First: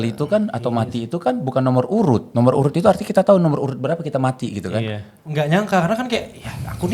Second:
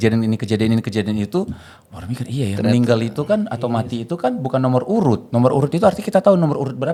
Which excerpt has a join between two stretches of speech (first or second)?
first